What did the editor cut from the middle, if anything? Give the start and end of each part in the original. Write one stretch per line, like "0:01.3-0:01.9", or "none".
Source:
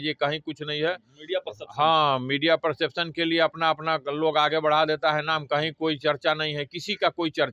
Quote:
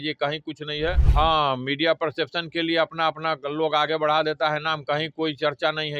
0:01.0-0:01.7